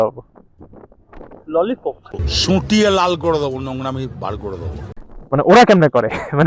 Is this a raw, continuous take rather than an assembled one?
no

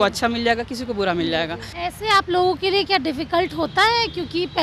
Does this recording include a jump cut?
yes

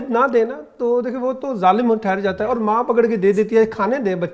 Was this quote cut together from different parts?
no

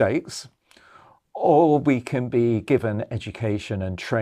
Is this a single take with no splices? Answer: yes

